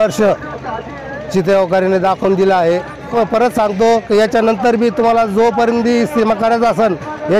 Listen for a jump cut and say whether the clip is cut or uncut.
cut